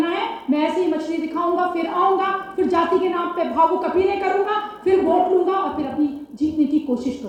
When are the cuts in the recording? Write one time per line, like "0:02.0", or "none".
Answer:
none